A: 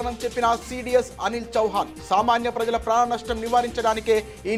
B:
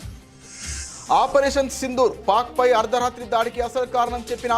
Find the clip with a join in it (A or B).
B